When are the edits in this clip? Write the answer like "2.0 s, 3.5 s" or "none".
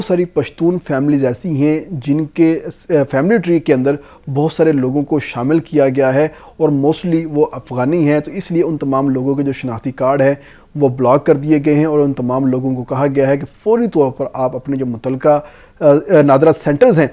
none